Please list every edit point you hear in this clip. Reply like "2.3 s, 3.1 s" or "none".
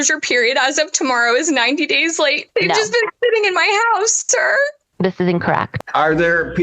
2.4 s, 5.7 s

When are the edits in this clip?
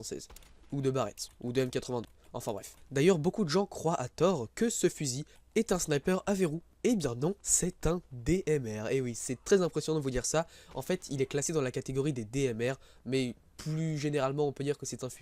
2.4 s

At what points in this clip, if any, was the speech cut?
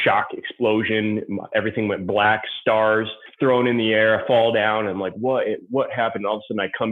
3.2 s

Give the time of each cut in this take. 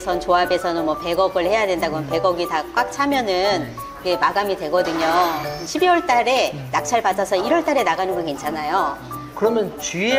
none

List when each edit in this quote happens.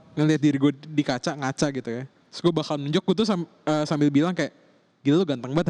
none

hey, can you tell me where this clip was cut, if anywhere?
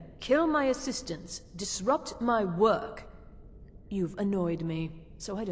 none

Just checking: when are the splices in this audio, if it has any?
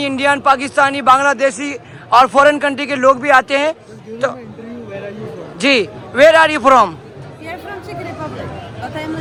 none

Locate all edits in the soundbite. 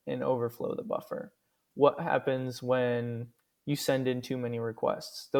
none

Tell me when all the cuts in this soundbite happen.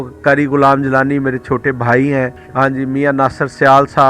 2.4 s

